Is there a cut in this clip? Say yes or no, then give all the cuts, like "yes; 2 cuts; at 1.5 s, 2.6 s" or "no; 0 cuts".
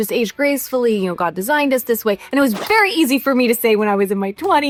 no; 0 cuts